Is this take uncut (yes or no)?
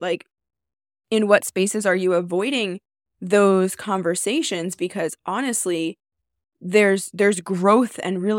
yes